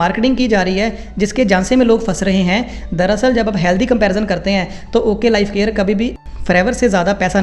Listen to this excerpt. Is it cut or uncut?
uncut